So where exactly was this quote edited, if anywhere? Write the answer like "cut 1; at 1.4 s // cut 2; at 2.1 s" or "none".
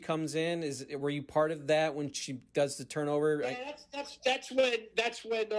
none